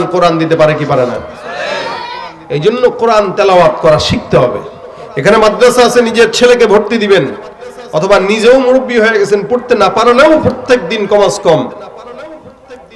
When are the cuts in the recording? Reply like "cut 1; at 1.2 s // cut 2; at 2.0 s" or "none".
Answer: none